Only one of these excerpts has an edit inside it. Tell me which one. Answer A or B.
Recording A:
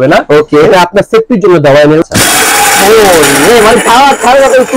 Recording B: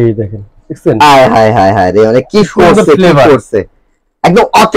A